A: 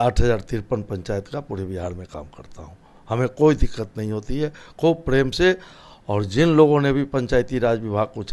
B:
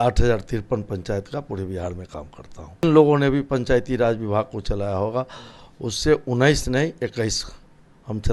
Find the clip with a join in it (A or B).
B